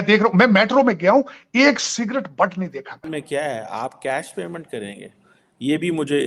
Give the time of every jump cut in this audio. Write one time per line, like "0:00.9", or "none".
0:03.1